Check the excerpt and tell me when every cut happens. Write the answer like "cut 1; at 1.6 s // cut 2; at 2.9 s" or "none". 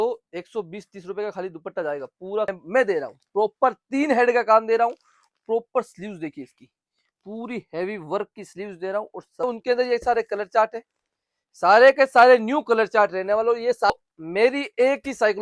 cut 1; at 2.5 s // cut 2; at 9.4 s // cut 3; at 13.9 s